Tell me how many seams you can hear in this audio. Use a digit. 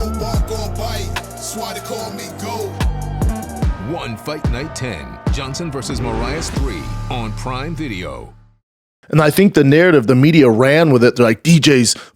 1